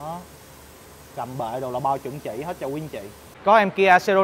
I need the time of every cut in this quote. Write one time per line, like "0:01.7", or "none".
0:03.2

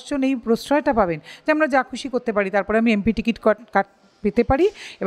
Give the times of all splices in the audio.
none

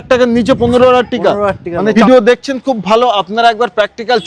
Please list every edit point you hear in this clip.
0:01.9

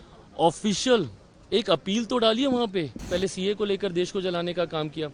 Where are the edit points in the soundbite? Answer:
0:03.1

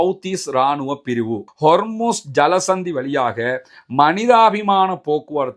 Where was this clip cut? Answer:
0:01.5

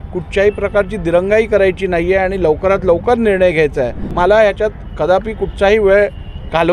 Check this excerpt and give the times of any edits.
0:04.0

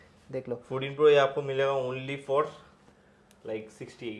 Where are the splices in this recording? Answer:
none

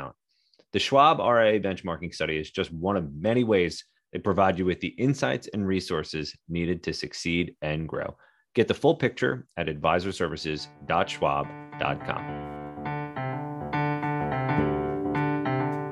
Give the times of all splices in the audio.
0:12.2

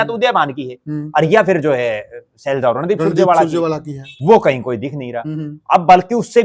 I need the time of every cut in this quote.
none

